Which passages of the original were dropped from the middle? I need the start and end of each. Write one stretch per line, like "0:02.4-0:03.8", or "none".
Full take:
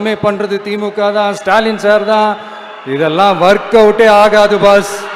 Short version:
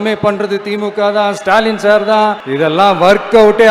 0:02.4-0:02.8